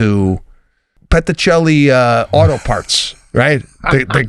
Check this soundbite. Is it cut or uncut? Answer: cut